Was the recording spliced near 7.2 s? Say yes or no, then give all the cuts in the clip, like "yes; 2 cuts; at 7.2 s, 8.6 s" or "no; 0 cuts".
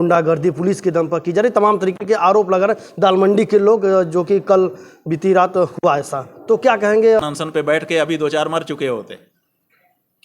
yes; 1 cut; at 7.2 s